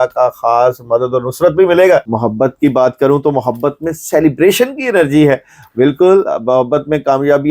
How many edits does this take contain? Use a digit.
1